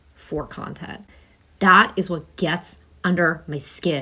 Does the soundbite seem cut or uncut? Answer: uncut